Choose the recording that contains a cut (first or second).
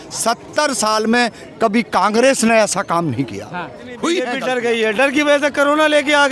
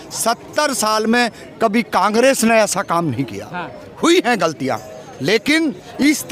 first